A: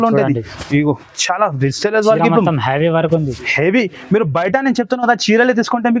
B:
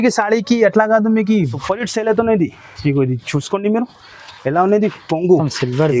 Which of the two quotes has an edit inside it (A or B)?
B